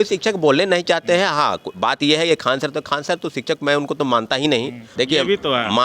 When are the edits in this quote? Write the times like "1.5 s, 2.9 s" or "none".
4.8 s